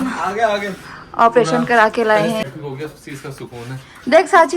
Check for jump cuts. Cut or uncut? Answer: cut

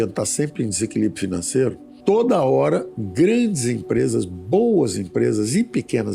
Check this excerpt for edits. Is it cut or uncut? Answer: cut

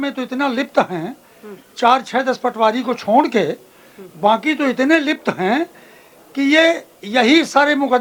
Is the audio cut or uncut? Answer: uncut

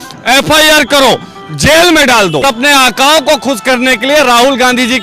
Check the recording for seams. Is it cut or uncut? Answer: cut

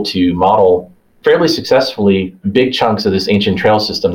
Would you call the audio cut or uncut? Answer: uncut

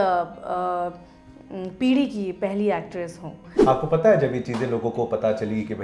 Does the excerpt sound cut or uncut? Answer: cut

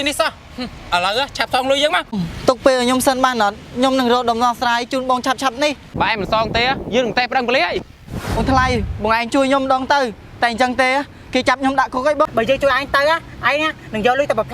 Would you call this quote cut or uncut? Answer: cut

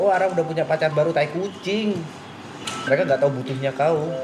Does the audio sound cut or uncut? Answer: cut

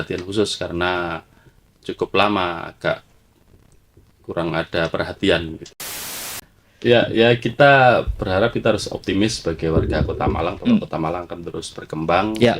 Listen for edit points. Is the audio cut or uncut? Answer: cut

